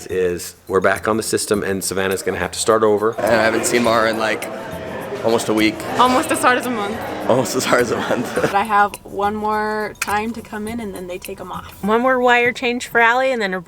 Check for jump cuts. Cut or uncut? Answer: cut